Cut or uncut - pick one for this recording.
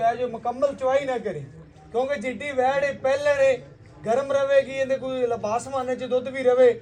uncut